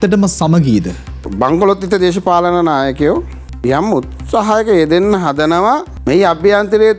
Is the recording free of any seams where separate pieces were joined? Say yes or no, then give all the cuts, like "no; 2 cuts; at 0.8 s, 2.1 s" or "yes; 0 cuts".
no; 3 cuts; at 1.2 s, 3.4 s, 5.9 s